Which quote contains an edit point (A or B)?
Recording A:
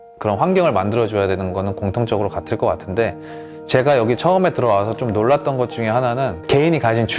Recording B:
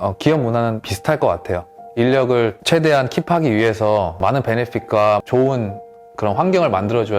B